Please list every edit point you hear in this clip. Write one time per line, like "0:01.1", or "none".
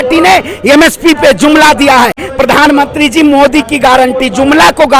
0:02.3